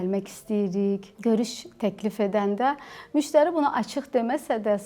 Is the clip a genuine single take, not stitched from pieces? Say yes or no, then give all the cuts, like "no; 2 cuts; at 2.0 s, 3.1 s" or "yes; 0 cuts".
no; 1 cut; at 1.1 s